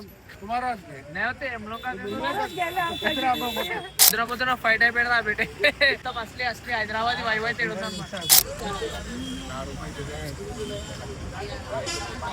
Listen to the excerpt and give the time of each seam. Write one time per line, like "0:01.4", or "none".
0:04.0
0:08.4